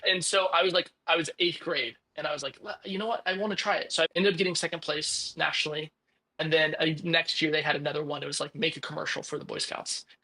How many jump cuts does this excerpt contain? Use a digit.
1